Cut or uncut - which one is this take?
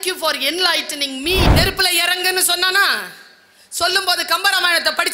cut